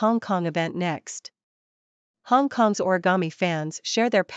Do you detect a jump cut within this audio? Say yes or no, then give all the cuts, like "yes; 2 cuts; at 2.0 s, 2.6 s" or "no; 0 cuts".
yes; 1 cut; at 2.2 s